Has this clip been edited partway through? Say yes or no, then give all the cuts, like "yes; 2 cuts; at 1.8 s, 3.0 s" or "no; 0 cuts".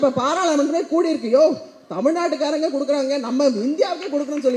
no; 0 cuts